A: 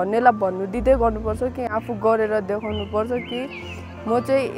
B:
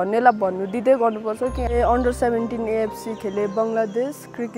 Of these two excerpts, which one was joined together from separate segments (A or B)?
B